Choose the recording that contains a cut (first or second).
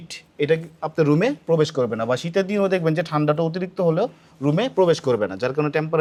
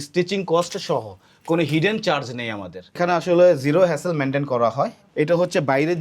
second